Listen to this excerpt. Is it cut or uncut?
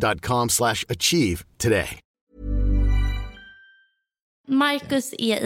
cut